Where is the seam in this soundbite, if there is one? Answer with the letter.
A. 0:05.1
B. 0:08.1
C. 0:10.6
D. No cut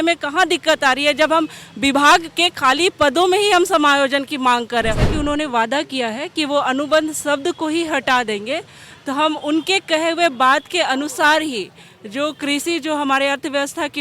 A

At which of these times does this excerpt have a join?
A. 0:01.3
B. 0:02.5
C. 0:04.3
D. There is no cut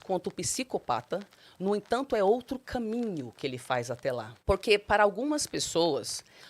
C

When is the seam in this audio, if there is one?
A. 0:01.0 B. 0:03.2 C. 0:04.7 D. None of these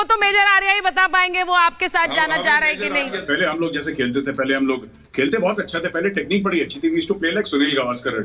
B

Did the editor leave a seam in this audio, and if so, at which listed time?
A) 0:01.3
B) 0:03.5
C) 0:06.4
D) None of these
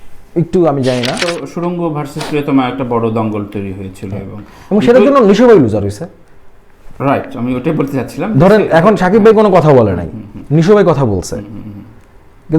A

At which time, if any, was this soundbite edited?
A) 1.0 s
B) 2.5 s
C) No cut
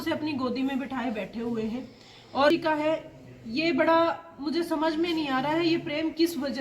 B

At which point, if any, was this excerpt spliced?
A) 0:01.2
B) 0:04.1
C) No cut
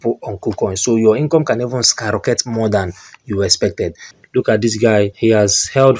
B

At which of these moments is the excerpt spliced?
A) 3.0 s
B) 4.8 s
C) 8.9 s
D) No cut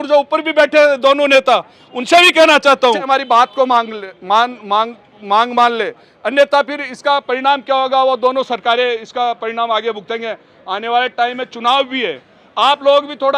A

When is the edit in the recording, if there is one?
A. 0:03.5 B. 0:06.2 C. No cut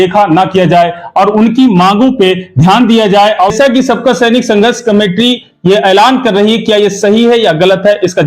A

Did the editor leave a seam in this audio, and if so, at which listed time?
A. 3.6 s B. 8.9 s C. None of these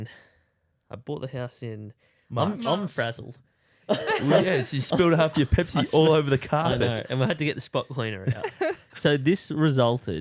B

